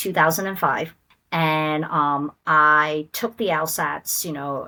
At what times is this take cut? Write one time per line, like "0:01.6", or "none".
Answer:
none